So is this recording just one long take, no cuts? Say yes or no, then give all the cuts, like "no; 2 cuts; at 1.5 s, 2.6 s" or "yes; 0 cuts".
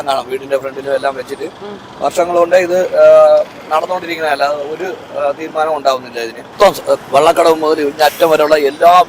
no; 1 cut; at 6.4 s